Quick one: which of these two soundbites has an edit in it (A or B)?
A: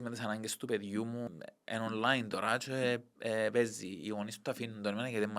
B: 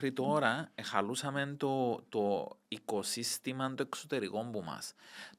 A